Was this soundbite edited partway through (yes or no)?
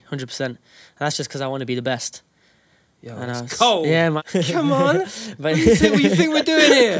yes